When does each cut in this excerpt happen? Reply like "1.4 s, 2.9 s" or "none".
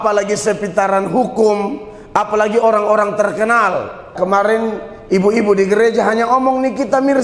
4.1 s